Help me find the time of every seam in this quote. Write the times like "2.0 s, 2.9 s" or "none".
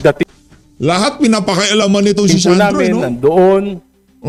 none

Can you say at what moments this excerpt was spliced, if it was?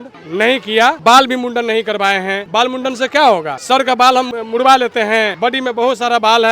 1.0 s, 2.4 s, 3.5 s, 4.3 s, 5.3 s

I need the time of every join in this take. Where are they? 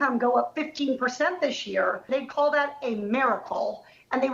2.1 s

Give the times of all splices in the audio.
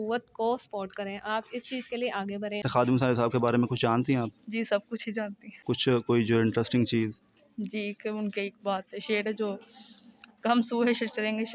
2.6 s, 5.5 s

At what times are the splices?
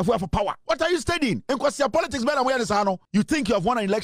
3.0 s

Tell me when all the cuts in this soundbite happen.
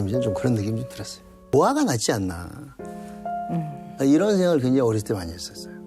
1.4 s

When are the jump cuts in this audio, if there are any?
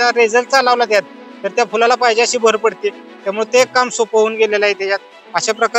none

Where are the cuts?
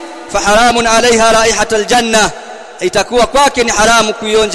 none

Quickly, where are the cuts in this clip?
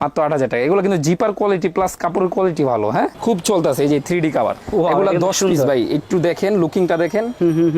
3.1 s

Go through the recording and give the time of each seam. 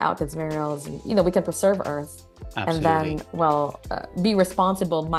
none

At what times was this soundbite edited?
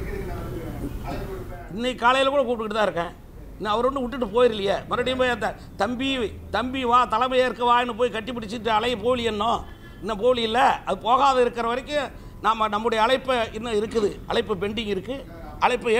none

